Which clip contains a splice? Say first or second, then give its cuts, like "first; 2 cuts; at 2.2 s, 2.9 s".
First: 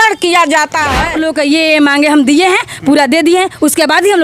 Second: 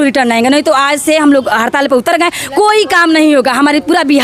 first; 1 cut; at 1.0 s